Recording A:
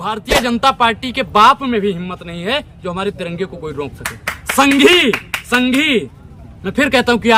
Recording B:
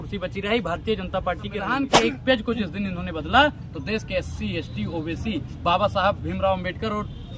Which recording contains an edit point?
B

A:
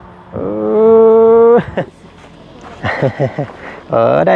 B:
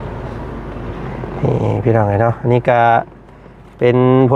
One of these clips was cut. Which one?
A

